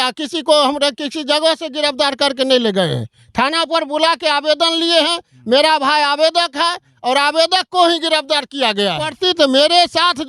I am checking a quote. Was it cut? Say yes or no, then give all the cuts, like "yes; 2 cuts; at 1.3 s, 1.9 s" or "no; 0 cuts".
yes; 1 cut; at 9.1 s